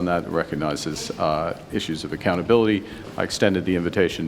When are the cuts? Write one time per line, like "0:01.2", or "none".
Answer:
none